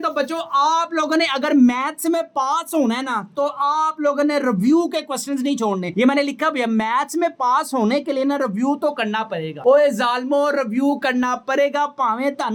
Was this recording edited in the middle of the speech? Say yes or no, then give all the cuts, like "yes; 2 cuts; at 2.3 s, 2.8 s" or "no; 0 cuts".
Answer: no; 0 cuts